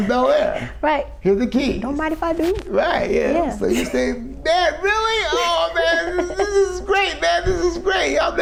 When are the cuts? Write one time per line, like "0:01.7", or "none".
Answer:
none

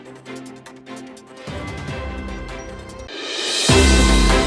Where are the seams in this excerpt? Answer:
0:03.1

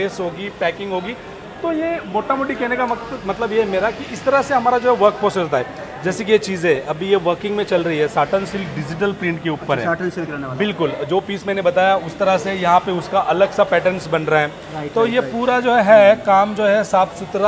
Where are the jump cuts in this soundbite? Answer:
none

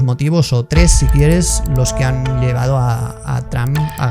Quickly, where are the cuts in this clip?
none

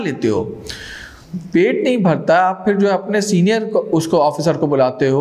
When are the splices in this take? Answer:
none

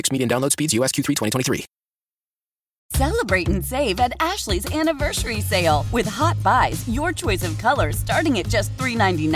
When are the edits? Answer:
0:02.7

